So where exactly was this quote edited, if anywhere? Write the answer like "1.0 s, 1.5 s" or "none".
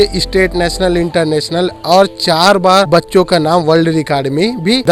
none